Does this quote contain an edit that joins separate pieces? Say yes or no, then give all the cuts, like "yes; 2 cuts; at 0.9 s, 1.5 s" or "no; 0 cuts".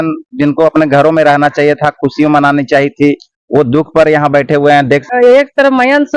yes; 1 cut; at 5.0 s